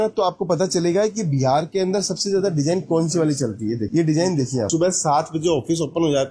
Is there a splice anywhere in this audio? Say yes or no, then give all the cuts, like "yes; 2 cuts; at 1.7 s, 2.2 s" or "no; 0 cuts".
yes; 1 cut; at 4.7 s